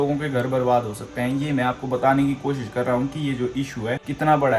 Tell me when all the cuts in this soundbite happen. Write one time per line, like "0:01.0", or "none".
none